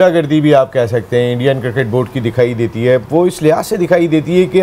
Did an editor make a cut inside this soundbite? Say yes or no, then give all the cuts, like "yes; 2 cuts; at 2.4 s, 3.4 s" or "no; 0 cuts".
no; 0 cuts